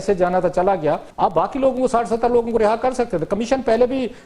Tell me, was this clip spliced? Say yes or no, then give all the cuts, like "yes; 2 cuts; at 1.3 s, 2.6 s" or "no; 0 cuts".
yes; 1 cut; at 1.1 s